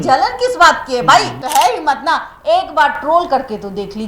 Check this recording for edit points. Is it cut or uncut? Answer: cut